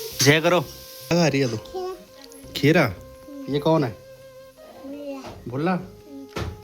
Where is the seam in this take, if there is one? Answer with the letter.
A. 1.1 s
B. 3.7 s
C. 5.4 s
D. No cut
A